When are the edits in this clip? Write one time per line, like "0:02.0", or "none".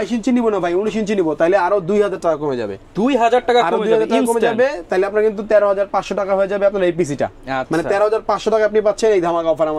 none